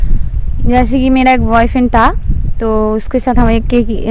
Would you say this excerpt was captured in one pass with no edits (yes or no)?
yes